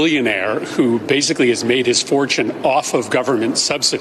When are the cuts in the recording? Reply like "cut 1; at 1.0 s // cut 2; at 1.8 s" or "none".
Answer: none